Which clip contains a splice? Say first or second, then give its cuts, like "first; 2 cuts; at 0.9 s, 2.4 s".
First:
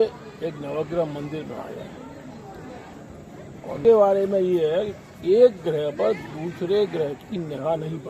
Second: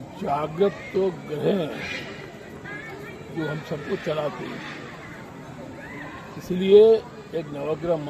first; 1 cut; at 3.8 s